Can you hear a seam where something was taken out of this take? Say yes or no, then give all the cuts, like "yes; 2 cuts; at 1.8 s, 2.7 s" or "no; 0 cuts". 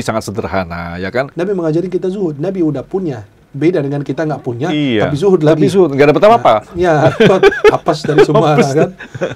yes; 1 cut; at 1.3 s